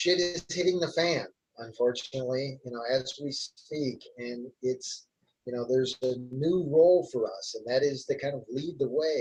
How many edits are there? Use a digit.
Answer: 0